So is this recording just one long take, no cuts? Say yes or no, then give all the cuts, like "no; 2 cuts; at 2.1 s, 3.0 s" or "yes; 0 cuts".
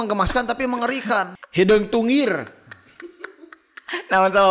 no; 1 cut; at 1.3 s